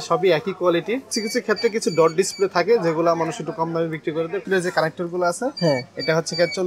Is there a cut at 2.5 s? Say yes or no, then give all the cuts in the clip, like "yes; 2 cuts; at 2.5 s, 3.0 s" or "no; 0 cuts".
no; 2 cuts; at 1.1 s, 4.4 s